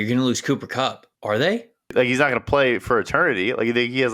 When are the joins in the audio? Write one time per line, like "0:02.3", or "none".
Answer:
0:01.1
0:01.9